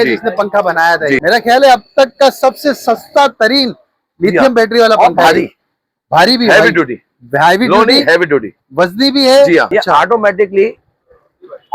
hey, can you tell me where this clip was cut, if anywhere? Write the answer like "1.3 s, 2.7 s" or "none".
1.2 s, 9.7 s